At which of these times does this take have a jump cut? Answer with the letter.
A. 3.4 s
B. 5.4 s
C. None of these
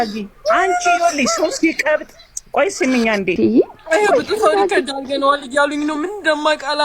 A